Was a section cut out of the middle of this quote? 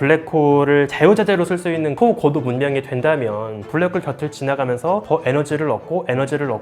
yes; 2 cuts; at 1.9 s, 3.7 s

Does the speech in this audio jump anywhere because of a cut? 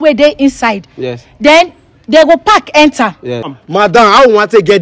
yes; 1 cut; at 3.6 s

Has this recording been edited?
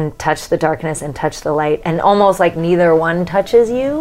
yes; 1 cut; at 1.8 s

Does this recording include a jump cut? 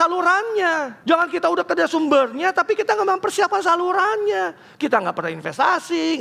yes; 1 cut; at 0.9 s

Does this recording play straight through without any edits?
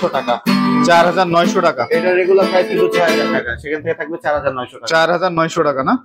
yes; 0 cuts

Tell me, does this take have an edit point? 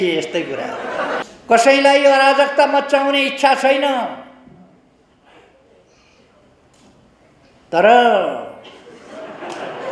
yes; 1 cut; at 1.2 s

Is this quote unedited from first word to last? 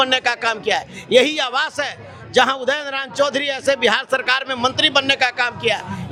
yes; 0 cuts

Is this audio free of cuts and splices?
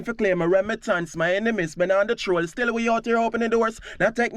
no; 1 cut; at 1.1 s

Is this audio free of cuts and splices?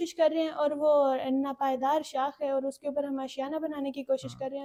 yes; 0 cuts

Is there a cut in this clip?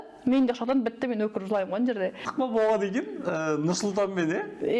yes; 1 cut; at 2.2 s

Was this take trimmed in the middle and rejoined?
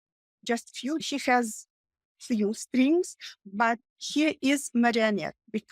yes; 1 cut; at 1.0 s

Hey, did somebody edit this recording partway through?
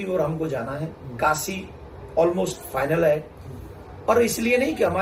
no; 0 cuts

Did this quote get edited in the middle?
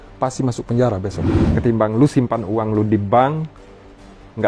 yes; 1 cut; at 1.4 s

